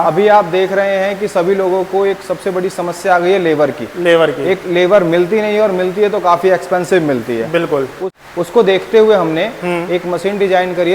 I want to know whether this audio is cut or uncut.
uncut